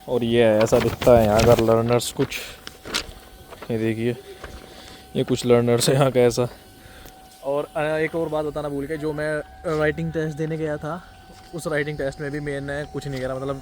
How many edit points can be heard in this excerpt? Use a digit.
1